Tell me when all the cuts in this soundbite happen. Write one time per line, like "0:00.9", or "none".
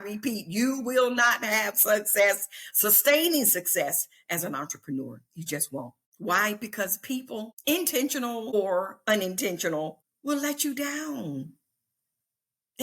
0:06.0
0:07.5
0:08.5
0:10.1